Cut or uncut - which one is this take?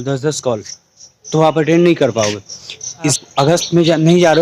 cut